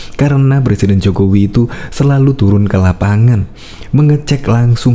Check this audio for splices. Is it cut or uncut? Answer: uncut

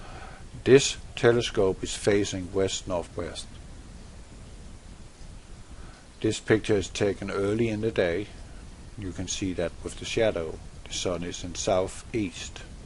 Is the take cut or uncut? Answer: cut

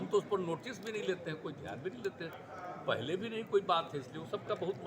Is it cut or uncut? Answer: uncut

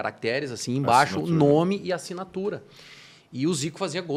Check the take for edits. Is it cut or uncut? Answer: uncut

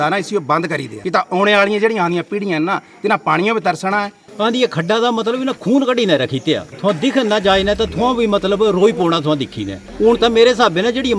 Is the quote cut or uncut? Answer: cut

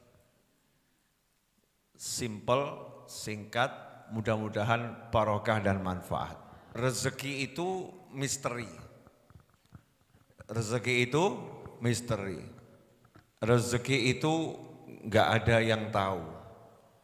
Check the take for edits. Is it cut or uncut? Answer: cut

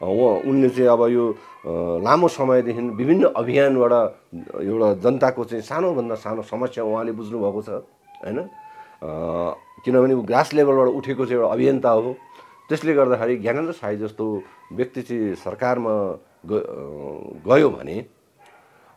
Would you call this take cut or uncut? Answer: uncut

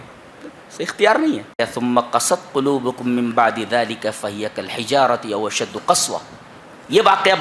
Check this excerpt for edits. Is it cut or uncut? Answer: cut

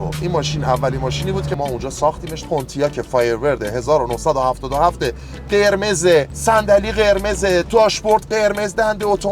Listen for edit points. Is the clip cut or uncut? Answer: cut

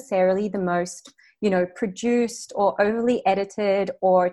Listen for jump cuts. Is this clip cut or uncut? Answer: uncut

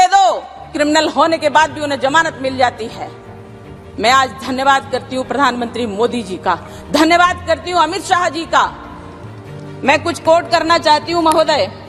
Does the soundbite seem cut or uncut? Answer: uncut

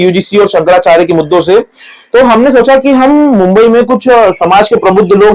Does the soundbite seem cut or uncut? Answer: uncut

